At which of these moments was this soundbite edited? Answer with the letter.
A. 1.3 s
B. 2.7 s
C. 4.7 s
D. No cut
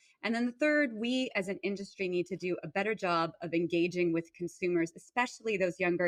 D